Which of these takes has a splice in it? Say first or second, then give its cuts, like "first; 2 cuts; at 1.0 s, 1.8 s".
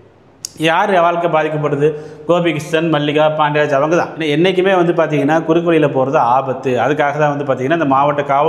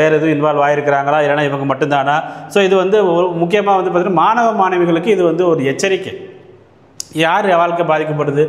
first; 1 cut; at 4.2 s